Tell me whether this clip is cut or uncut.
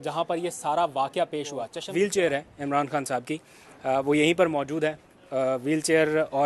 cut